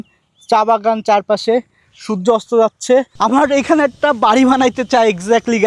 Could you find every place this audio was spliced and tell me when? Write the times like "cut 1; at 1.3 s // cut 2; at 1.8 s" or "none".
cut 1; at 3.1 s